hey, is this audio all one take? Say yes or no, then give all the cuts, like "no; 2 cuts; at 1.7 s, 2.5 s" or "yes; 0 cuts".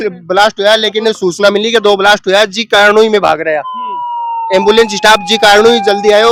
yes; 0 cuts